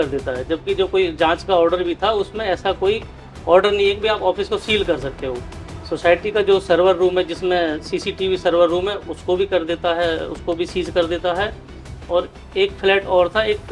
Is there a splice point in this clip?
no; 0 cuts

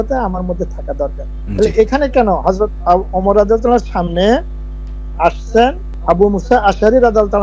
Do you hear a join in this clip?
no; 0 cuts

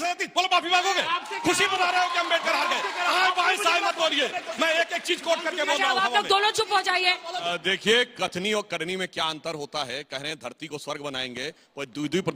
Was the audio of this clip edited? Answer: no; 0 cuts

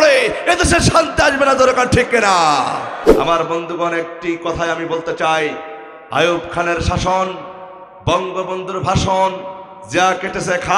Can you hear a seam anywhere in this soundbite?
yes; 1 cut; at 3.0 s

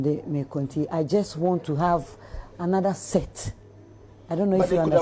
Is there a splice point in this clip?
no; 0 cuts

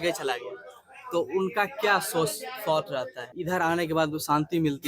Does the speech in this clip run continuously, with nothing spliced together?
no; 1 cut; at 3.2 s

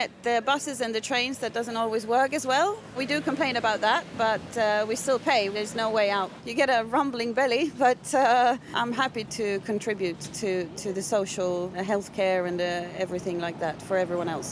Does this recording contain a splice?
yes; 4 cuts; at 3.0 s, 5.5 s, 6.4 s, 9.2 s

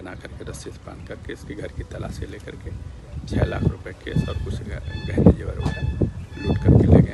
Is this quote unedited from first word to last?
yes; 0 cuts

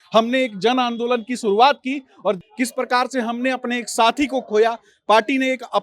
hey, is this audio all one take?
no; 1 cut; at 2.4 s

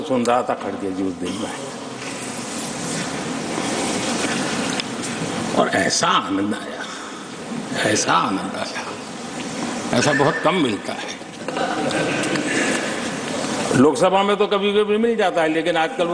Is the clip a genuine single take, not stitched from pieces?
yes; 0 cuts

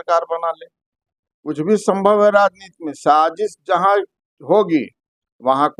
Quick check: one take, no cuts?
yes; 0 cuts

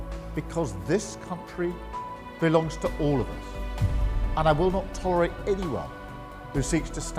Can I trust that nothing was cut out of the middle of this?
no; 1 cut; at 3.2 s

